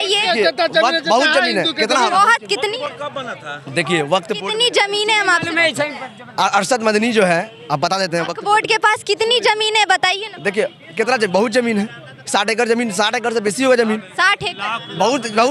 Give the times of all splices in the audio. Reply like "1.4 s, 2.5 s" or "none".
none